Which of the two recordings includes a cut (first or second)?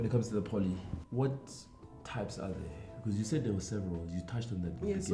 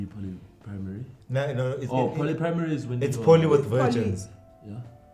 first